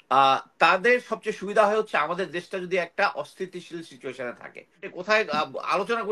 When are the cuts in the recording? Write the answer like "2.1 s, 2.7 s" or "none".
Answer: 4.9 s

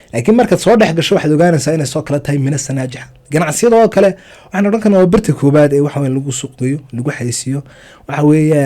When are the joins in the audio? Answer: none

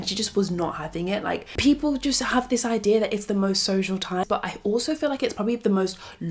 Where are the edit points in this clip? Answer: 1.5 s, 4.3 s

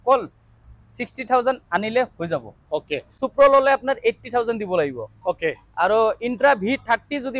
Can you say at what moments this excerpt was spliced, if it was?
3.2 s

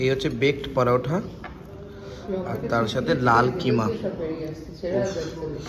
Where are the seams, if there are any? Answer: none

